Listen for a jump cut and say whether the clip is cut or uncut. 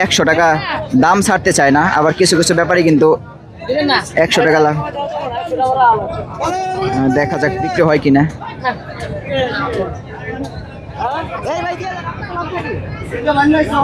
uncut